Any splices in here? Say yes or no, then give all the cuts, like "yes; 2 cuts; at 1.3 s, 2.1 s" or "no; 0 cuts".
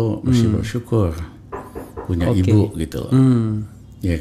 no; 0 cuts